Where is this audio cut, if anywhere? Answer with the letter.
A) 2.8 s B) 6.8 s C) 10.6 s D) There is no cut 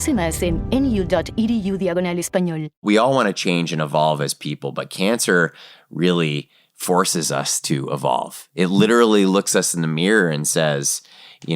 A